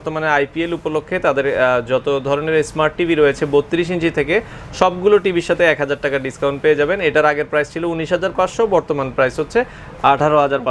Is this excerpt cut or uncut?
uncut